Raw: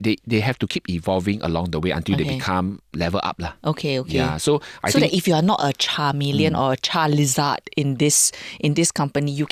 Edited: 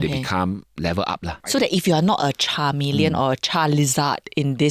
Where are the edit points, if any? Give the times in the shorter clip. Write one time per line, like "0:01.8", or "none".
0:01.4